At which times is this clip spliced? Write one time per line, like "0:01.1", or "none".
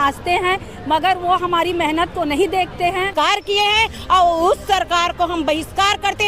0:03.1